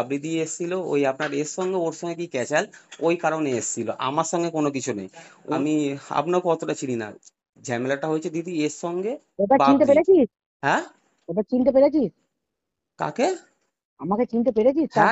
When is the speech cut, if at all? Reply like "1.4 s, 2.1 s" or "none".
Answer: 5.6 s